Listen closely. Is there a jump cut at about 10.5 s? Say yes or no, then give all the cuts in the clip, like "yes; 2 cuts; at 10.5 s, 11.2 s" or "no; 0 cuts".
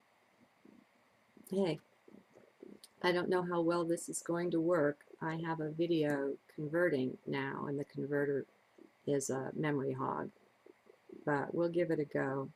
no; 0 cuts